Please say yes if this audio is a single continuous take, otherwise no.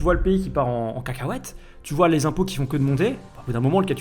yes